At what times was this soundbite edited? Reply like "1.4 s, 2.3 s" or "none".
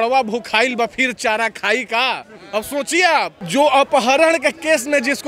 3.4 s

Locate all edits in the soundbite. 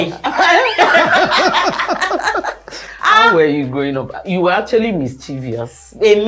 none

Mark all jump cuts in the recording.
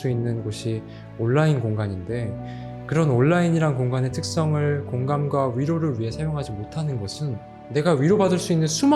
7.5 s

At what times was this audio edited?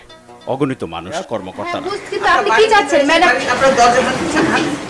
1.2 s

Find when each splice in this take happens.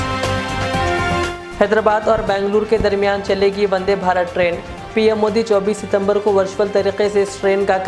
1.2 s

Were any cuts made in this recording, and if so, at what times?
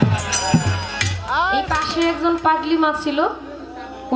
1.7 s

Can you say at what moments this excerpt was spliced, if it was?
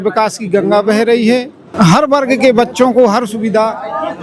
1.6 s

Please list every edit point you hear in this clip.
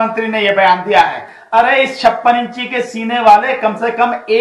1.3 s

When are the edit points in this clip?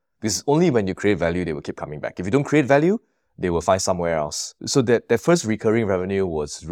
4.6 s

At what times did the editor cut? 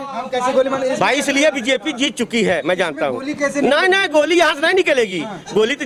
none

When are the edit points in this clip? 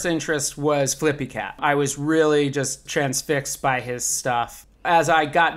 1.6 s, 2.8 s, 4.4 s

